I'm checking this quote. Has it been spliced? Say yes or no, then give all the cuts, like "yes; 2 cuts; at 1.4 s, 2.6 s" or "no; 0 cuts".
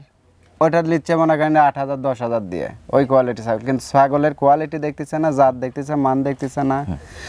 no; 0 cuts